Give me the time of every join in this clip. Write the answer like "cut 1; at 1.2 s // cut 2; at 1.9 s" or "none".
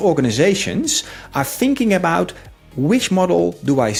none